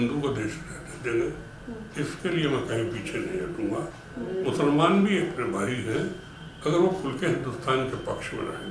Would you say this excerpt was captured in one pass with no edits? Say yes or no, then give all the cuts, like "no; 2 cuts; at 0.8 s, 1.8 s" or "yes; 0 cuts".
yes; 0 cuts